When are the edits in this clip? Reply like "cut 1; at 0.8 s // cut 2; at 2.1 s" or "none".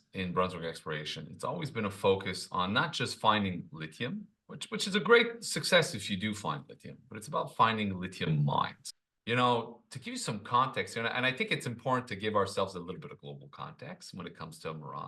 cut 1; at 8.9 s